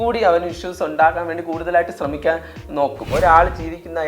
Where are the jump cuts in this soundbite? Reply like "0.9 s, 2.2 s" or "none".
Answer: 3.1 s